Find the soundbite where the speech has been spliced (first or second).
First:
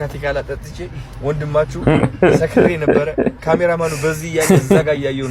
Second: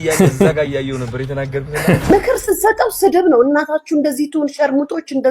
second